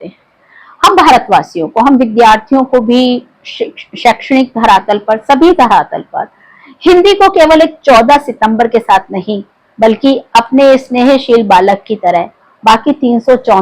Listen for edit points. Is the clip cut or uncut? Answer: uncut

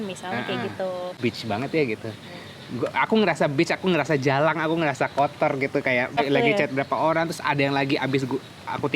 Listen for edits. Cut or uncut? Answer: cut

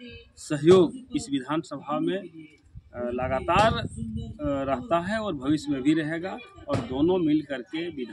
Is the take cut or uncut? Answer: uncut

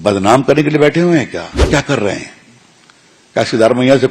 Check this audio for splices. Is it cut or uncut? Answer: cut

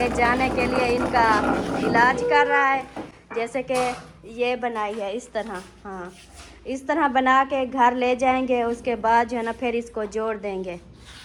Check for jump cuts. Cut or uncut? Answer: uncut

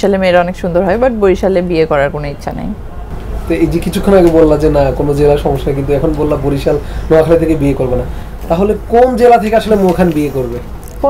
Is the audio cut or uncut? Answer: uncut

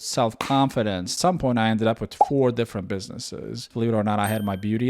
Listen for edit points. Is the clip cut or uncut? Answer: cut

